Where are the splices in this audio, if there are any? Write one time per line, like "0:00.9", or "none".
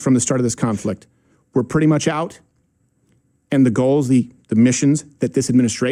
none